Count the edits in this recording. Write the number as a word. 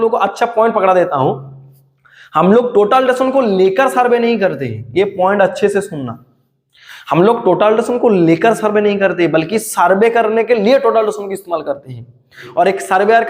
one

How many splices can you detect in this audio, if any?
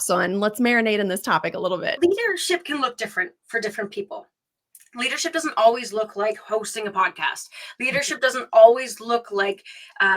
one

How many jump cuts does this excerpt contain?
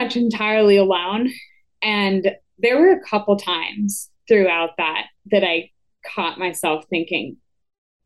one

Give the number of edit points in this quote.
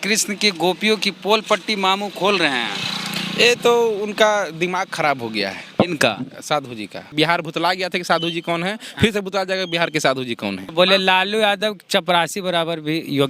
two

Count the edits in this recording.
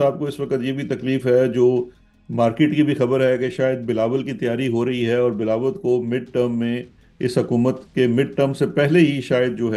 zero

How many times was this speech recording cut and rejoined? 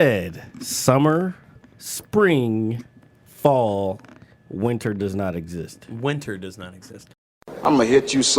one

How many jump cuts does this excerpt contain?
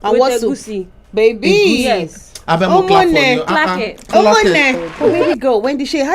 one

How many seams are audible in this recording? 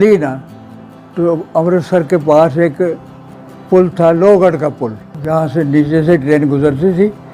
one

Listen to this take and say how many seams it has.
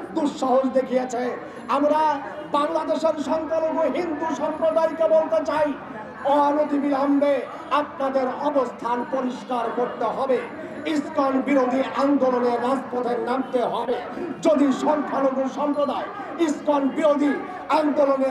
zero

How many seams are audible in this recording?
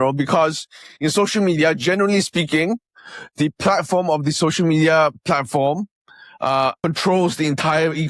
one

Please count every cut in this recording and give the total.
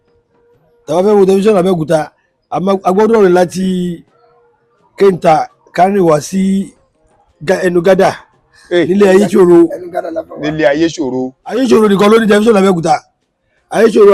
one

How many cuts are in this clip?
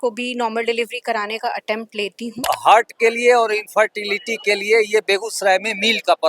one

